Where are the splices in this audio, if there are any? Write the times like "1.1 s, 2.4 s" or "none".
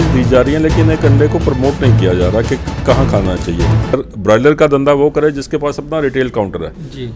4.0 s